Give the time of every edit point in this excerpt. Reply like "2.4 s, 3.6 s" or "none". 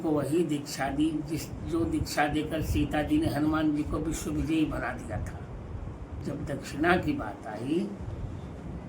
6.1 s